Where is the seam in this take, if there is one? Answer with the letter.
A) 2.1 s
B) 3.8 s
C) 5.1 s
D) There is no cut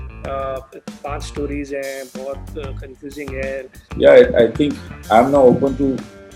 B